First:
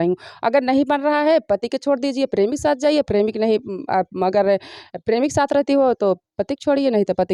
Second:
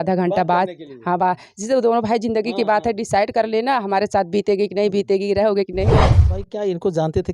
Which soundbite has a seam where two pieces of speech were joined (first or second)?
second